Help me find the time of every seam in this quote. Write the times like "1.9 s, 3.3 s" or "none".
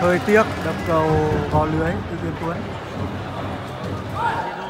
3.5 s